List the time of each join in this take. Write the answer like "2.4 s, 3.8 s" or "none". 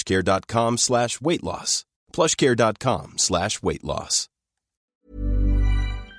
4.9 s